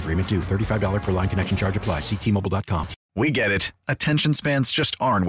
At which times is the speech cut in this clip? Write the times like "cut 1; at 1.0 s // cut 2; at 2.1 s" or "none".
cut 1; at 3.0 s